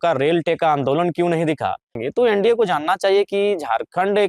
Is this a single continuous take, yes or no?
no